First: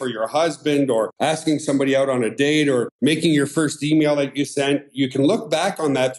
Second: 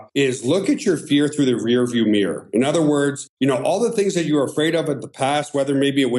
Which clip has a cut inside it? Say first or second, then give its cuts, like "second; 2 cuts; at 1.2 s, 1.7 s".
first; 2 cuts; at 1.1 s, 2.9 s